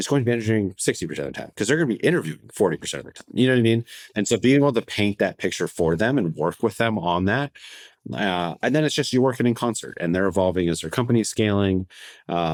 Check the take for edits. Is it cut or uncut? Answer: uncut